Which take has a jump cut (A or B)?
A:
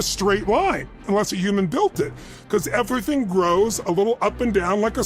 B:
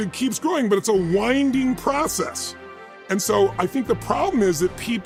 A